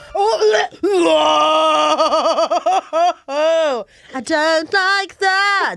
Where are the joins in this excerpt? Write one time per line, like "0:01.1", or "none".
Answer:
none